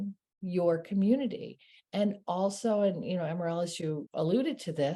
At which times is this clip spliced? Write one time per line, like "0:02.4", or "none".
0:04.0